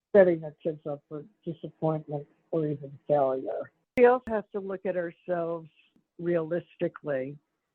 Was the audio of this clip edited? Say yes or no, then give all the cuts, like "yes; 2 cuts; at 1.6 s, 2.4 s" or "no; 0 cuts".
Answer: yes; 1 cut; at 4.0 s